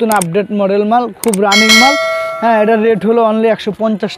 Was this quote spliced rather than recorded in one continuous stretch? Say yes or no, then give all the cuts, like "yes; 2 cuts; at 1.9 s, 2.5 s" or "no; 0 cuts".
no; 0 cuts